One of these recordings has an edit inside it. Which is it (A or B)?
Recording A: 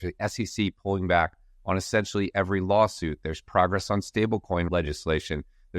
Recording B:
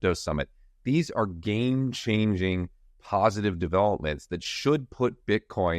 A